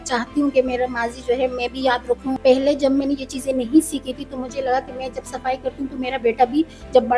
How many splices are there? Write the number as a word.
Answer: one